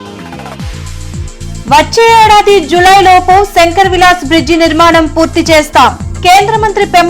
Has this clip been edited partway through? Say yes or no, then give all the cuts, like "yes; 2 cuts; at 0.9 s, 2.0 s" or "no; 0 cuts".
yes; 1 cut; at 1.3 s